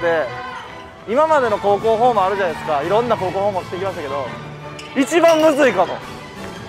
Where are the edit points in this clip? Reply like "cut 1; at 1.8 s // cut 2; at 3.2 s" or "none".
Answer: none